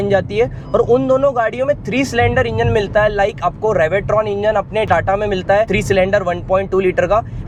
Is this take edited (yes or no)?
no